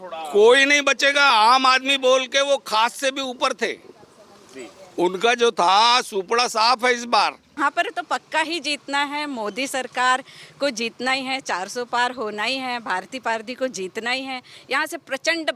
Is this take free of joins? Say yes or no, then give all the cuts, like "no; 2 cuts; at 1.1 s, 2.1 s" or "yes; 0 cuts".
no; 1 cut; at 7.6 s